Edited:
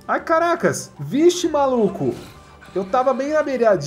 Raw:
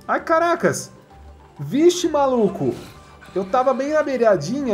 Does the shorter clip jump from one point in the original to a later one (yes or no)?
yes